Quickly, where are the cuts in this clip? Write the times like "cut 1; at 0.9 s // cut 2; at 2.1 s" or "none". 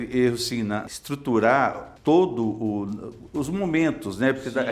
cut 1; at 0.9 s // cut 2; at 1.9 s